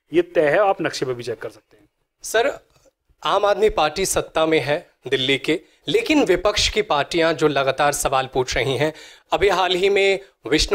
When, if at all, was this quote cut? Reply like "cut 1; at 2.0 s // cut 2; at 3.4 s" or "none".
none